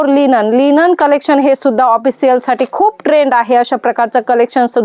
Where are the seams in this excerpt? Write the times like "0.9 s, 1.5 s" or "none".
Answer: none